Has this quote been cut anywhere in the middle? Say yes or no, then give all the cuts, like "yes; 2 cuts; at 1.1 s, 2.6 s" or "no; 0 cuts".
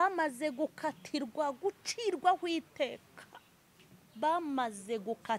no; 0 cuts